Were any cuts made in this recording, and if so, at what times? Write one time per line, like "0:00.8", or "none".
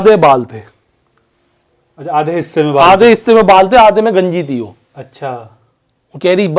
none